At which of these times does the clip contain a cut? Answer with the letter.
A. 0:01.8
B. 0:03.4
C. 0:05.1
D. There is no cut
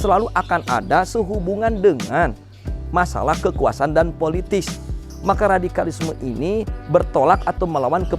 C